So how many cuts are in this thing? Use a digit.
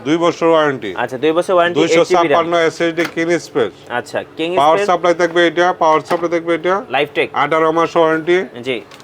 0